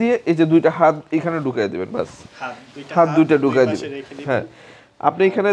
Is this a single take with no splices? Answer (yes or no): yes